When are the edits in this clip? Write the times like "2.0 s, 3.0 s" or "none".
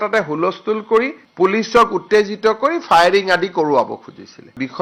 none